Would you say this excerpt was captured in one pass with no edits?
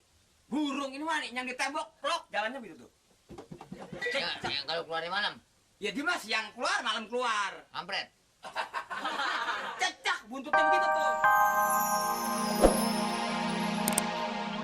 no; 1 cut; at 10.6 s

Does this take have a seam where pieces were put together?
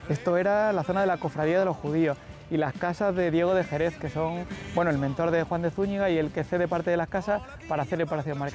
no; 0 cuts

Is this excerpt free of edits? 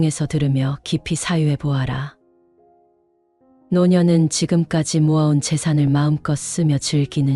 yes; 0 cuts

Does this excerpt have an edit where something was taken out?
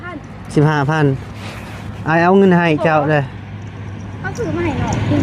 no; 0 cuts

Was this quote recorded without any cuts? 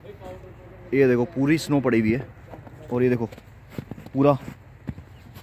yes; 0 cuts

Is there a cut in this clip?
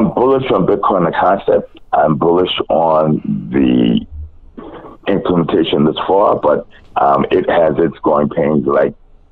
no; 0 cuts

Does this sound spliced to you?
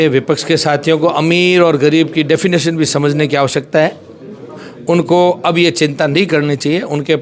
no; 0 cuts

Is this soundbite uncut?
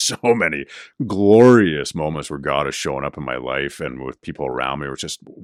yes; 0 cuts

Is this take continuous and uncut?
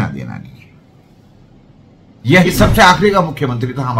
no; 1 cut; at 2.5 s

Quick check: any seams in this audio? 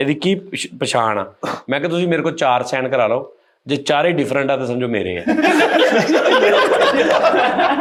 no; 0 cuts

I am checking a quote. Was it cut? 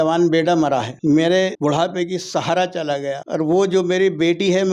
yes; 3 cuts; at 0.9 s, 1.6 s, 3.2 s

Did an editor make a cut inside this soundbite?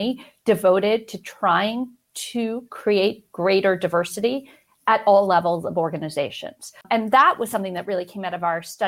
yes; 1 cut; at 6.8 s

